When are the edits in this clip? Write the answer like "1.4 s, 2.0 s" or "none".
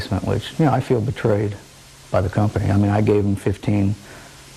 2.7 s